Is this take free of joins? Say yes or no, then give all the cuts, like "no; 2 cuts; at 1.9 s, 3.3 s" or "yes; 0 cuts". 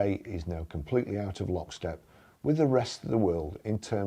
yes; 0 cuts